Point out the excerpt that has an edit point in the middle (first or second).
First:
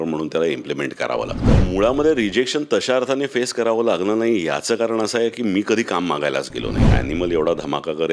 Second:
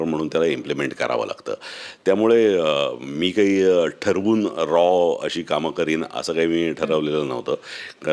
first